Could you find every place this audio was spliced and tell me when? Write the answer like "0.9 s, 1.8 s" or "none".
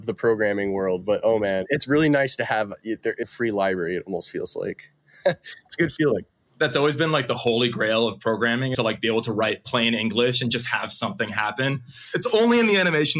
1.6 s, 3.3 s, 8.9 s, 12.1 s

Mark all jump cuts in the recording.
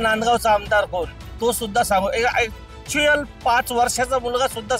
none

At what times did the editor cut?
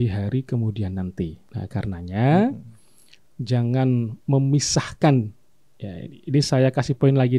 1.4 s

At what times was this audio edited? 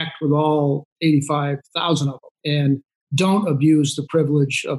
2.3 s

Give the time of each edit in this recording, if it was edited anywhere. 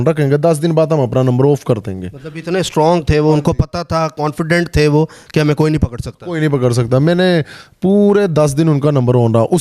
none

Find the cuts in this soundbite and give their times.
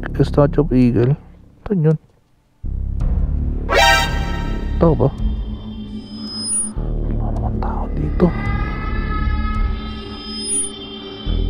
none

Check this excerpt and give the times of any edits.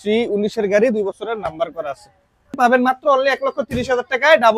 2.5 s

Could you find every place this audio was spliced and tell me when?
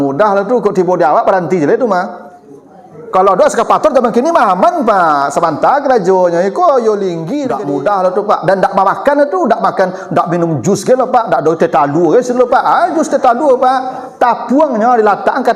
7.3 s

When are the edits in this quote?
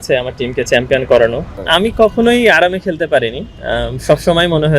1.5 s

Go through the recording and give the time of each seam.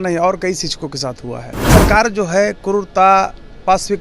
1.5 s

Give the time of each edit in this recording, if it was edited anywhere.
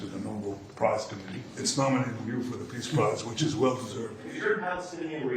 1.6 s, 4.3 s

